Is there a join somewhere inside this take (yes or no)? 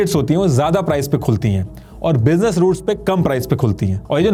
no